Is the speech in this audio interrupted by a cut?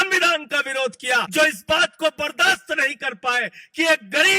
yes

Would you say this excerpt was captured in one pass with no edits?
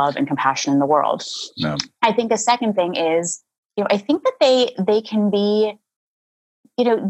yes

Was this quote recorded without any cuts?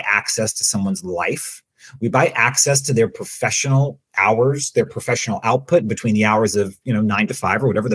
yes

